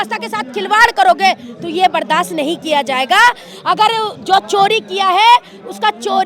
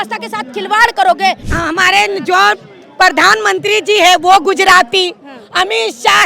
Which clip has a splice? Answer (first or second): second